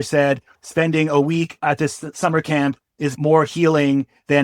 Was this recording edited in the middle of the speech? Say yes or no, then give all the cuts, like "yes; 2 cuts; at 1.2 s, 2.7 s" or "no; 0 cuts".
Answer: yes; 1 cut; at 1.5 s